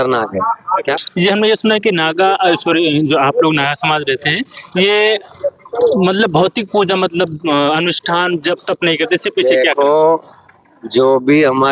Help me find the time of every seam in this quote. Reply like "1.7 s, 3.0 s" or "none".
none